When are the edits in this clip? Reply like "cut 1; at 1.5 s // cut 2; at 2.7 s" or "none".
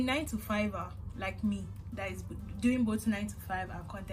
none